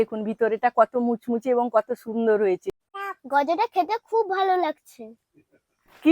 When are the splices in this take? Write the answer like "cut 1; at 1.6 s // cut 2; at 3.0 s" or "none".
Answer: cut 1; at 2.7 s